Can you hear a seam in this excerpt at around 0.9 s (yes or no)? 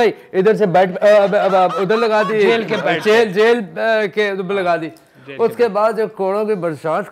no